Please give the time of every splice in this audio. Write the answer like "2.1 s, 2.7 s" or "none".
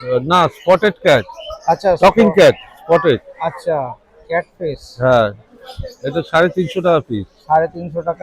none